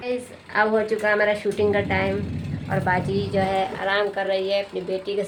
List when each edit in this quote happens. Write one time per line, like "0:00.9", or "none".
none